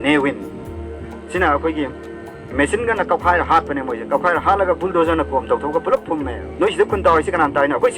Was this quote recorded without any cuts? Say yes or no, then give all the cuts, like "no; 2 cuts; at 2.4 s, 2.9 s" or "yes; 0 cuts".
no; 1 cut; at 6.4 s